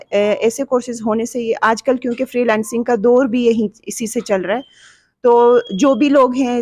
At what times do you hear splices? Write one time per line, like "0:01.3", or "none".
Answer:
none

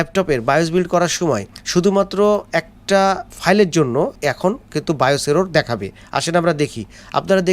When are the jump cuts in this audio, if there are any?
0:01.5
0:03.3
0:04.1

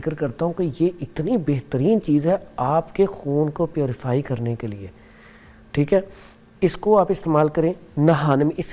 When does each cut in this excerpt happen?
none

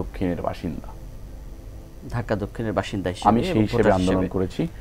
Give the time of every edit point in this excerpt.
none

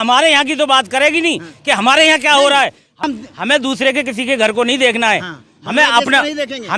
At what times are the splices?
0:03.0

